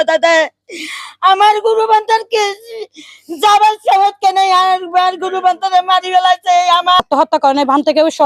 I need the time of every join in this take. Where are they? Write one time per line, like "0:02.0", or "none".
0:07.0